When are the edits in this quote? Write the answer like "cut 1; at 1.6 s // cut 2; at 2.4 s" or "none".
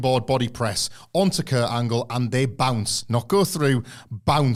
none